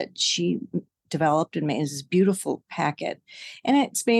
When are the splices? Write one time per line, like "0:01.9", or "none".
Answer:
0:01.0